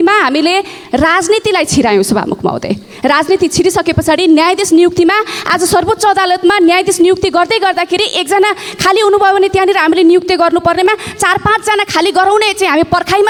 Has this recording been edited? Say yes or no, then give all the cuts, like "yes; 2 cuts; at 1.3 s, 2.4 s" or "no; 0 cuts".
no; 0 cuts